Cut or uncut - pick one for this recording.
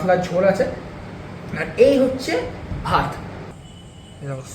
cut